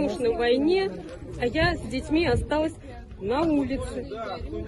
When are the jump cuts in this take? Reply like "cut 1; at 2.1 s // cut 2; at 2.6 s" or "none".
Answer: none